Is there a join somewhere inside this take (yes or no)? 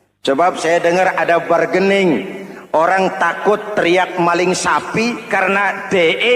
no